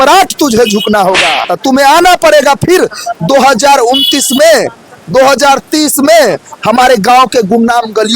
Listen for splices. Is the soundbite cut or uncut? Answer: cut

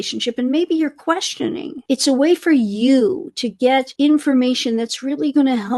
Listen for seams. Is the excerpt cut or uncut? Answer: uncut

